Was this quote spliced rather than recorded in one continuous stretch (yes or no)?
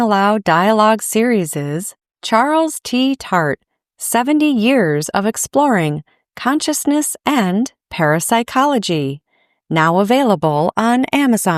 no